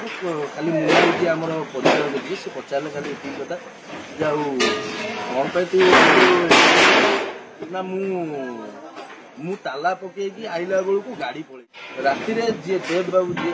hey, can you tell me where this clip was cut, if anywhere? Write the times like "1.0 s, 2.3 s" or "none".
11.4 s